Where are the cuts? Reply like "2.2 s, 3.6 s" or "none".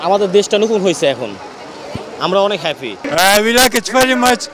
3.0 s